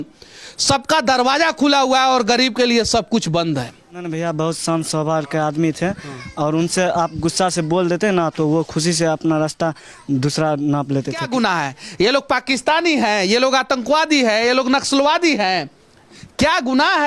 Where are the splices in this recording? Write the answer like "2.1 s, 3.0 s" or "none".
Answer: 4.1 s, 11.2 s